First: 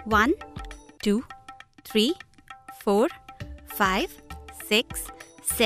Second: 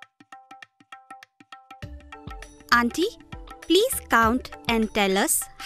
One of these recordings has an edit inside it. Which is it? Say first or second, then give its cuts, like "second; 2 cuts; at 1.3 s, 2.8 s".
second; 2 cuts; at 1.2 s, 2.6 s